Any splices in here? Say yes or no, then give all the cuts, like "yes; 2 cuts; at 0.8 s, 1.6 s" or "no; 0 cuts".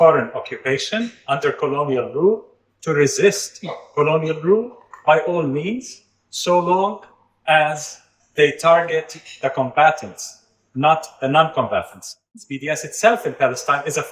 yes; 1 cut; at 12.5 s